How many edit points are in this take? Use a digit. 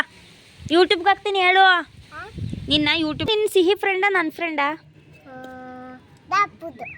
1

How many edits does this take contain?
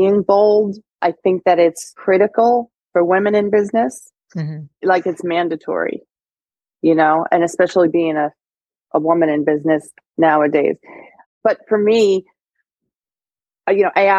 5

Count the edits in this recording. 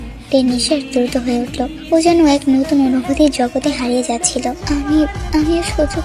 1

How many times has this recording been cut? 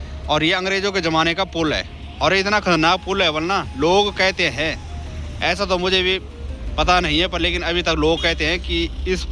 0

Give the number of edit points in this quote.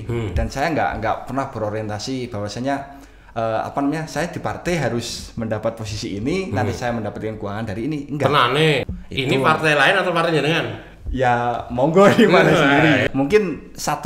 2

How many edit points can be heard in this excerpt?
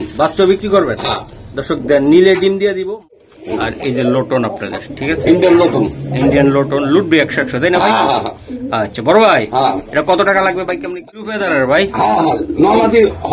2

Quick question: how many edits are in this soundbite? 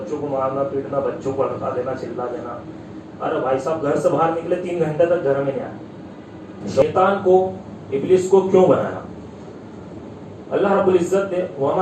1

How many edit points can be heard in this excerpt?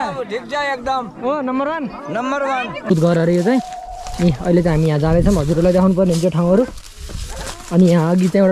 1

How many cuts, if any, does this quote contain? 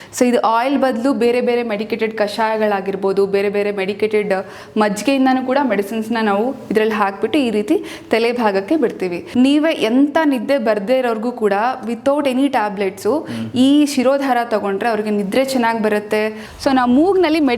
2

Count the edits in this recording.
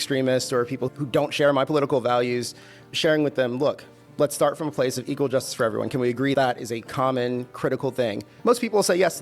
1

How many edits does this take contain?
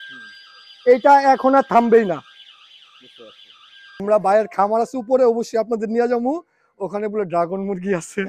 1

